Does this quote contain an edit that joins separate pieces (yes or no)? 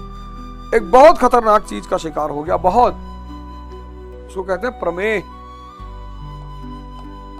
yes